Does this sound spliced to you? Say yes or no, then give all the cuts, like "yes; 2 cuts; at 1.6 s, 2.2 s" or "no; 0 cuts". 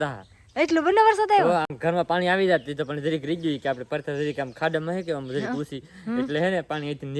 no; 0 cuts